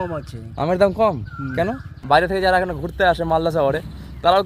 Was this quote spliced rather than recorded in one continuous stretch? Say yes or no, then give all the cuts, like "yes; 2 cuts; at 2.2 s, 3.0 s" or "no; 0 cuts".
yes; 1 cut; at 2.0 s